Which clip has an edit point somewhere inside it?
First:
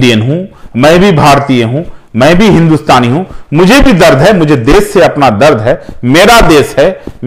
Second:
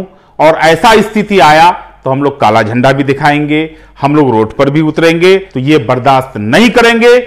second; 1 cut; at 5.5 s

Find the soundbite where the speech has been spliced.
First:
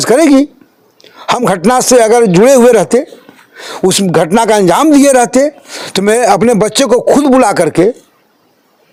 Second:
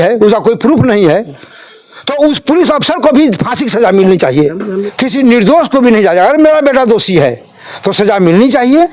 second; 1 cut; at 4.8 s

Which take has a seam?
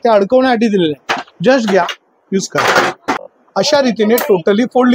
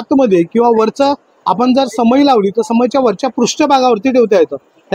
first; 1 cut; at 3.3 s

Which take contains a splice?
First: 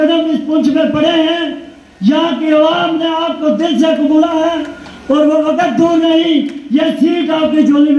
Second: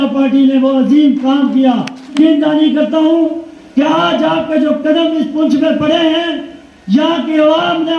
second; 1 cut; at 2.1 s

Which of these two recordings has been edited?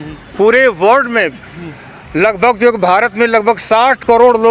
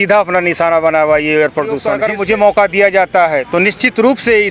second; 1 cut; at 1.9 s

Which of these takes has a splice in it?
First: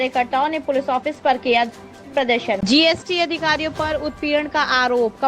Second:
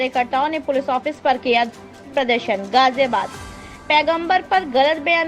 first; 1 cut; at 2.6 s

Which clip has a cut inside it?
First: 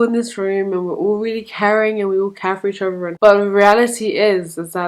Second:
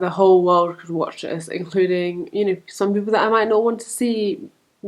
first; 1 cut; at 3.1 s

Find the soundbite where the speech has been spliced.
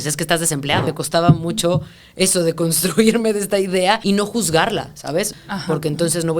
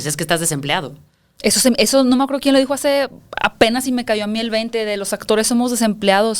first; 3 cuts; at 0.9 s, 4.0 s, 5.3 s

